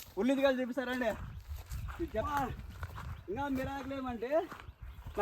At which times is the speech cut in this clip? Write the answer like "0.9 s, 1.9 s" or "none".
2.3 s